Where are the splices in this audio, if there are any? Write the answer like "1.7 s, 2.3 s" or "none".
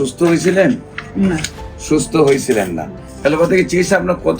3.1 s